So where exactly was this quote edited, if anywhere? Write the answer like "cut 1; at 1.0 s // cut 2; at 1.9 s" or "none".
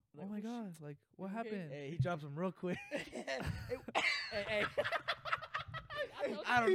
none